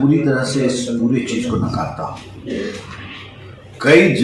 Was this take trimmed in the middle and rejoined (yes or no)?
no